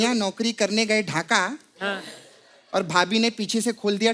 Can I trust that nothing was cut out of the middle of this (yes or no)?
yes